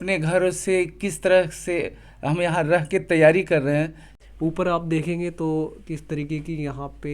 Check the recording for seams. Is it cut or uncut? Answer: cut